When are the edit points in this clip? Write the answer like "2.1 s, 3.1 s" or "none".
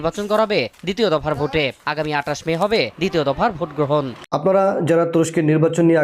4.2 s